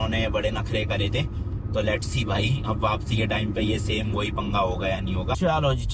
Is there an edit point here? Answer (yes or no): no